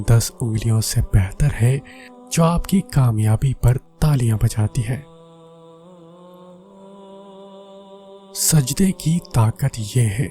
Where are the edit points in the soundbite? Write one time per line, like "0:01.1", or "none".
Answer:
0:05.1
0:07.0
0:08.5